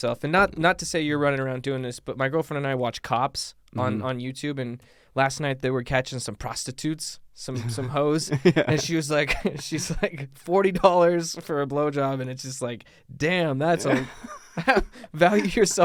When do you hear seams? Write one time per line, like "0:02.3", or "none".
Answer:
none